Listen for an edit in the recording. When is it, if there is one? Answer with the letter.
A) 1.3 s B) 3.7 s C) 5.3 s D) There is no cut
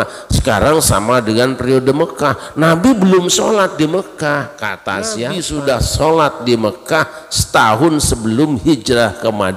C